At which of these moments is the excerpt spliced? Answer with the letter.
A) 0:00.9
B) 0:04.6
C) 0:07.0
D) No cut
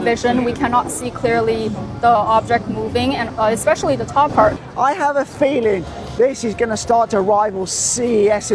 B